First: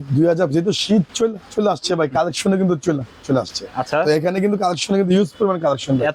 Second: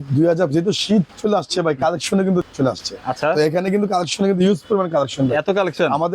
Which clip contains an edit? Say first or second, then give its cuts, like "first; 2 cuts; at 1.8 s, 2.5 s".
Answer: second; 2 cuts; at 1.1 s, 2.5 s